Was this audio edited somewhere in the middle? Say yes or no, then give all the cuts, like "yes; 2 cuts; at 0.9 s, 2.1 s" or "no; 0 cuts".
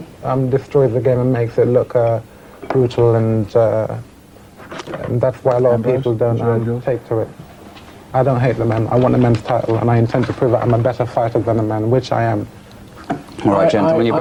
no; 0 cuts